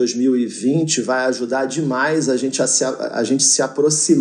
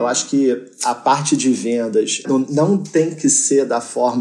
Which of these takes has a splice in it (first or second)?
second